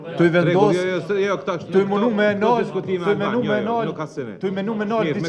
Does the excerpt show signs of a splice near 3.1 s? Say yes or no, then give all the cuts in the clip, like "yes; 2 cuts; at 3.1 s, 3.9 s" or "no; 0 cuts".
no; 0 cuts